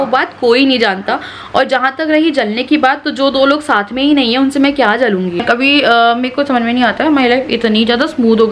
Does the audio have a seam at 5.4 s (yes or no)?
yes